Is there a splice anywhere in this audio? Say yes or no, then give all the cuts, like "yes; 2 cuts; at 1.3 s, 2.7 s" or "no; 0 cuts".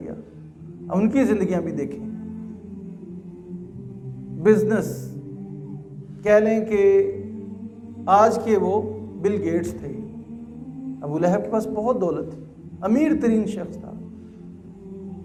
no; 0 cuts